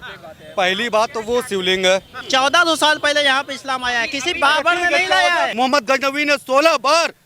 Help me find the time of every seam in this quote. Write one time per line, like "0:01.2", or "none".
0:02.1
0:05.5

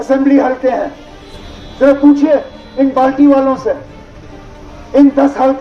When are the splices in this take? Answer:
none

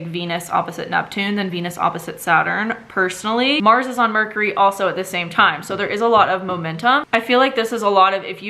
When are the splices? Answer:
0:03.6
0:07.1

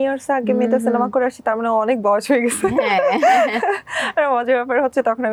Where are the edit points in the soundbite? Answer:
none

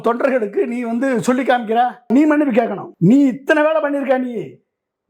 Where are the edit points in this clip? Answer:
0:02.1
0:02.8

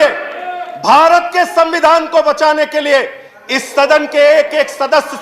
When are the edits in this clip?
none

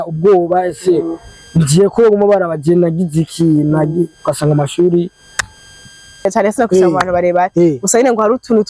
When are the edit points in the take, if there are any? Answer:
0:06.2

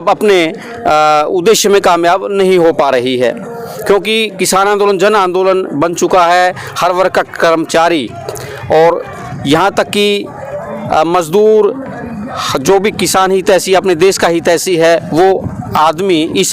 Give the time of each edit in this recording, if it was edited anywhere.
none

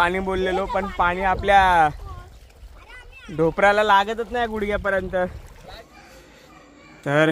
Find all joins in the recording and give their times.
0:05.5

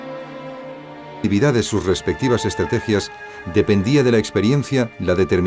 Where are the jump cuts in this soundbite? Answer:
none

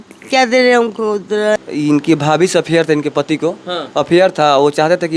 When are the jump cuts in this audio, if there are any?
0:01.6

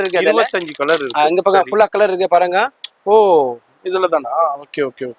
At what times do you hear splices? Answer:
none

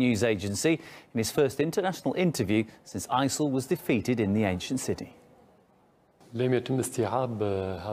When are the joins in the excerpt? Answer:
0:01.1

